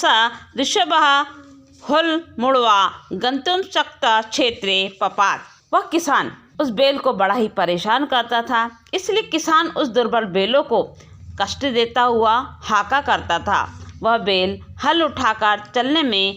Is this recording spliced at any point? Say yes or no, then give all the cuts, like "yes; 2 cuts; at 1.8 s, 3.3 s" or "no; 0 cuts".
yes; 2 cuts; at 5.5 s, 6.4 s